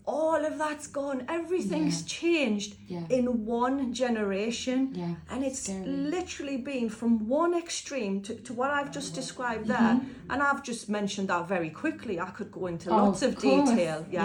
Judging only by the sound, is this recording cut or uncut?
uncut